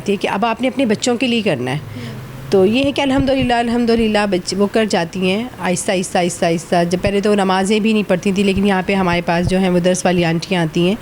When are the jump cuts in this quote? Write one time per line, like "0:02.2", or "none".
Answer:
none